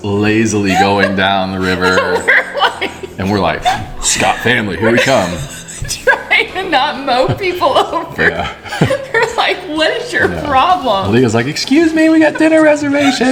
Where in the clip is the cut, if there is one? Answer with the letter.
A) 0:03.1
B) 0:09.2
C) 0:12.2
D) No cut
D